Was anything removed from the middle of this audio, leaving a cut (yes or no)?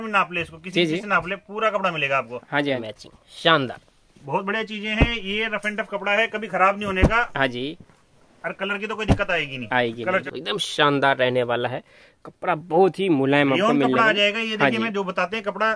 yes